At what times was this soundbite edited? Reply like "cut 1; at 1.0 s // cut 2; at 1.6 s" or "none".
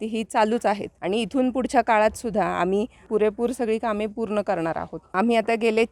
cut 1; at 0.9 s // cut 2; at 3.1 s // cut 3; at 5.1 s